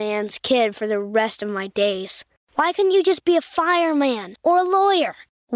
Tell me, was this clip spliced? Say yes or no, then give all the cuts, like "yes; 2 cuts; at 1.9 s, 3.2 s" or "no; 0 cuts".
no; 0 cuts